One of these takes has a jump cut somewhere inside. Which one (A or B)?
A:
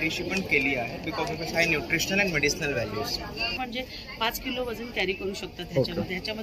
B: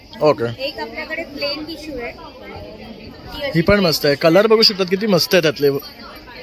A